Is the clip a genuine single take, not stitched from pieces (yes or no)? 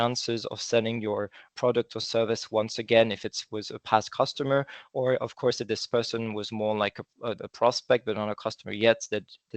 yes